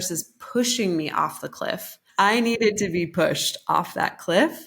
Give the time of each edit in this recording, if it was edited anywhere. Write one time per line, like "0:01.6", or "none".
0:01.8

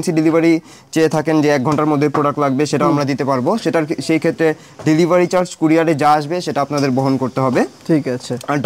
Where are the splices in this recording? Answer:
none

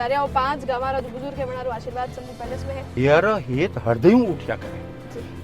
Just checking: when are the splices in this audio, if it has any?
0:03.0

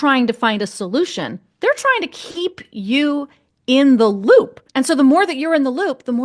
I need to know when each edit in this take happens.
0:04.6

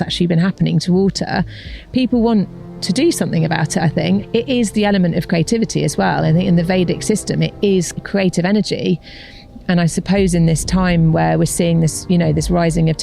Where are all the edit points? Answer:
0:04.2
0:08.0

